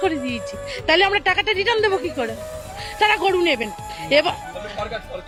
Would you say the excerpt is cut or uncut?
uncut